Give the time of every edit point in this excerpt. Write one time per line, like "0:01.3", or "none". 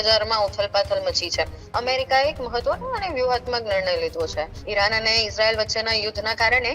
0:01.6
0:04.6